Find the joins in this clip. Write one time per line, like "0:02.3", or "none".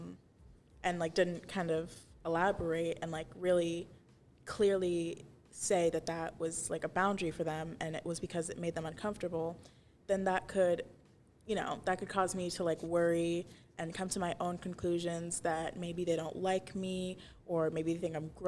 none